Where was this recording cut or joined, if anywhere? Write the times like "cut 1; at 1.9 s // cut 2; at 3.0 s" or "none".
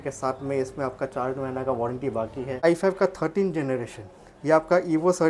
cut 1; at 2.6 s